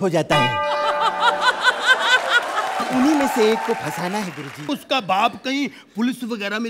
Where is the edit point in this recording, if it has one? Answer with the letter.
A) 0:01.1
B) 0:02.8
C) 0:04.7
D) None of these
C